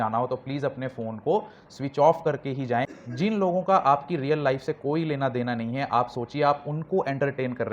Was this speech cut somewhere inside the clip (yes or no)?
yes